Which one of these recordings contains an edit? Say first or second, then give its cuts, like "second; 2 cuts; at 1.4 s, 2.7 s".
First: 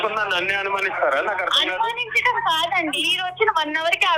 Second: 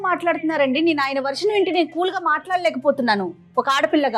first; 1 cut; at 3.1 s